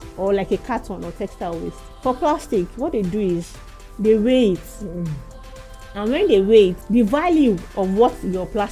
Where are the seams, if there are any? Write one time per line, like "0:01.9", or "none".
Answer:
0:01.9
0:06.8
0:07.7